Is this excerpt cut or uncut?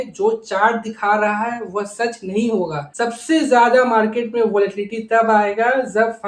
cut